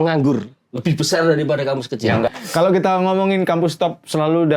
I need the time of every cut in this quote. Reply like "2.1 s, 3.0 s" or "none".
2.3 s

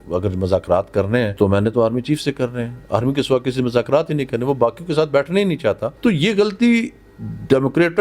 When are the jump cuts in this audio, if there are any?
1.3 s, 5.9 s

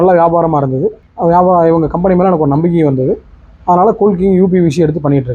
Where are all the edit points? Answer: 1.1 s

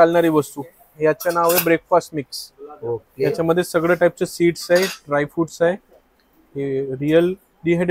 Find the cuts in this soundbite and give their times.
none

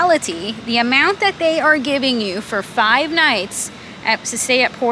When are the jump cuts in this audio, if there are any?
none

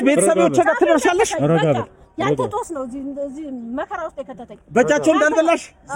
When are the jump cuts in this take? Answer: none

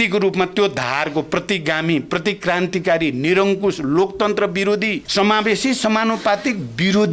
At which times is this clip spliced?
5.0 s

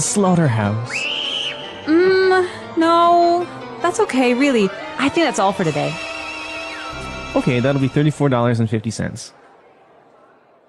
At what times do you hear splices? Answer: 6.9 s

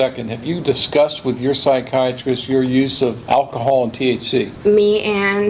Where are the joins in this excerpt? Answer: 3.2 s, 4.5 s

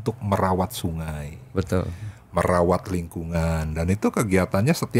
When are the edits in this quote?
none

